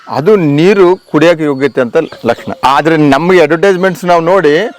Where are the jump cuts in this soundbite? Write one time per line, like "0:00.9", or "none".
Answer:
0:02.5